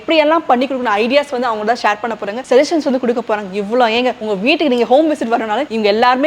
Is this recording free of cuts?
yes; 0 cuts

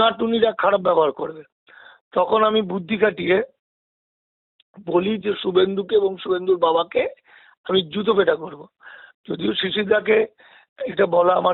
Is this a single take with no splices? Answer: yes; 0 cuts

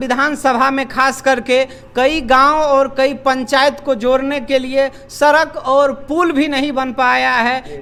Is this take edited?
no; 0 cuts

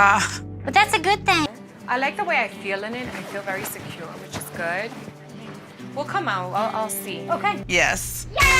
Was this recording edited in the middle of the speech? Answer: yes; 2 cuts; at 1.5 s, 7.7 s

